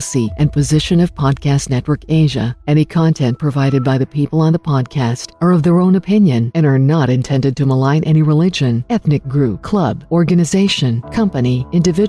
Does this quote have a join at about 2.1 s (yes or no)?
no